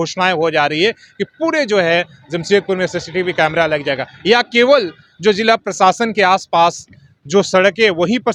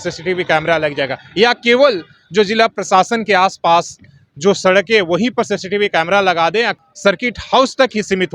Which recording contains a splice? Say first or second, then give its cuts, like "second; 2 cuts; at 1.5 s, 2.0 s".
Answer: second; 1 cut; at 6.7 s